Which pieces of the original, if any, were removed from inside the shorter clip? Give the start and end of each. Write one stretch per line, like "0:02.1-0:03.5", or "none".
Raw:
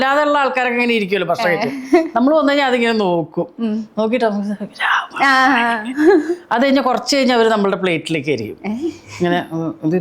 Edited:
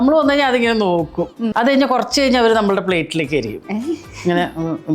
0:03.7-0:06.4